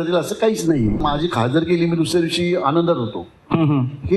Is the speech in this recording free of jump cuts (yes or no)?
no